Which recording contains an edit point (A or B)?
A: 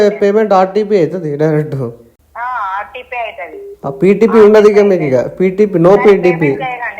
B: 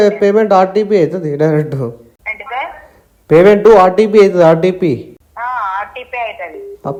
A